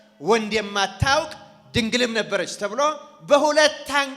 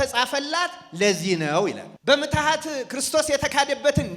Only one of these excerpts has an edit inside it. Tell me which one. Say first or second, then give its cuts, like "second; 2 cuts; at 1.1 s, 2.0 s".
second; 1 cut; at 1.9 s